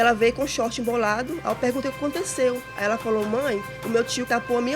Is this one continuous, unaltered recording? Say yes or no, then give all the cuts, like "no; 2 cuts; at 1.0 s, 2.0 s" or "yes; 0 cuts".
no; 1 cut; at 3.7 s